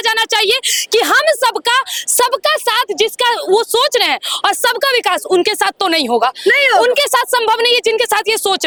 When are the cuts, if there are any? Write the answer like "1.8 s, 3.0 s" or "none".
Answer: none